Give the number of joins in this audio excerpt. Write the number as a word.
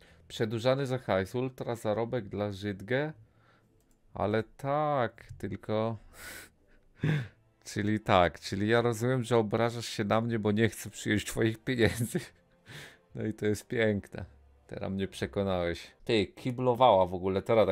one